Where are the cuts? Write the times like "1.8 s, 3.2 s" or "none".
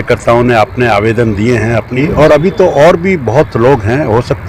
1.9 s